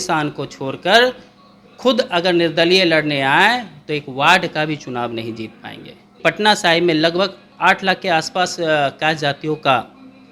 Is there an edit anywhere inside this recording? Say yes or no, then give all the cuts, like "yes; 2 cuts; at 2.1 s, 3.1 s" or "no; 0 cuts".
yes; 1 cut; at 6.2 s